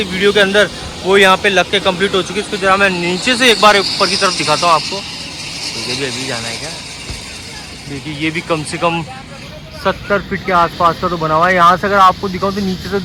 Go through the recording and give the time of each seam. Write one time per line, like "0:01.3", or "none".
none